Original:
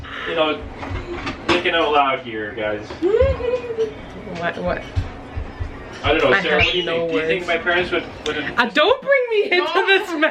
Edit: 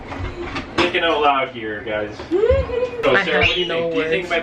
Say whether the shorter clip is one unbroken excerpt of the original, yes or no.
no